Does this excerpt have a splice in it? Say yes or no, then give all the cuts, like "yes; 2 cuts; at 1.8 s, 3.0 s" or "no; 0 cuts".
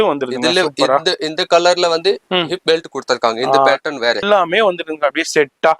yes; 1 cut; at 4.2 s